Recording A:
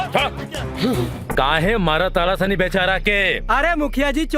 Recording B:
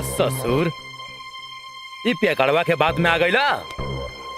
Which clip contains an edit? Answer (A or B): A